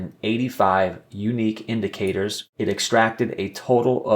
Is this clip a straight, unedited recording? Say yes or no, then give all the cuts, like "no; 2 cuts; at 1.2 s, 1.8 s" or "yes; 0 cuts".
no; 1 cut; at 2.4 s